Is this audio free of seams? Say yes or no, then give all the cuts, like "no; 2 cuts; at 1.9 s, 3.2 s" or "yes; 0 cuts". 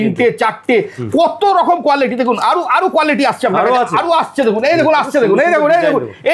yes; 0 cuts